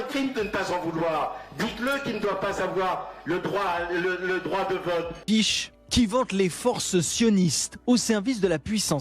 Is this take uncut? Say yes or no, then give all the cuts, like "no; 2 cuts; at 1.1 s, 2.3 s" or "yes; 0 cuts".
no; 1 cut; at 5.2 s